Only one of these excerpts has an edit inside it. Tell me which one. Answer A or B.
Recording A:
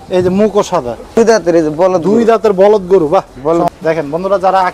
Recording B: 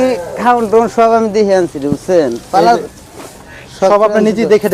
A